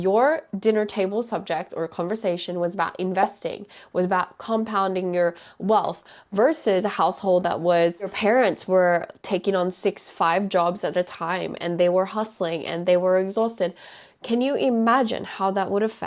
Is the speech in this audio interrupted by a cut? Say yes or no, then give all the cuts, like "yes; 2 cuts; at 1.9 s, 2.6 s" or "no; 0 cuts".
no; 0 cuts